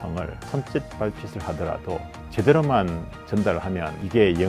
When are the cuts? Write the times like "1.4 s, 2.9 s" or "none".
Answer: none